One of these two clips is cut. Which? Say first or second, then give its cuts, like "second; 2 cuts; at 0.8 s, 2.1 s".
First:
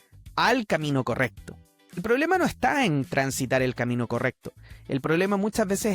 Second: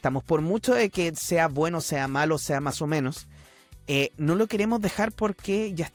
first; 1 cut; at 2.0 s